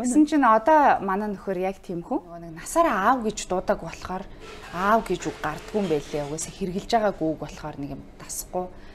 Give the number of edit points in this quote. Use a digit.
1